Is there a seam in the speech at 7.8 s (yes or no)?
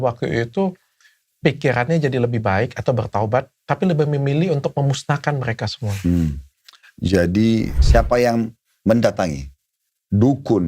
yes